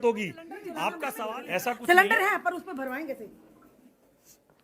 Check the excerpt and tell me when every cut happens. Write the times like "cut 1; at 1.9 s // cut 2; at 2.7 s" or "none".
cut 1; at 1.2 s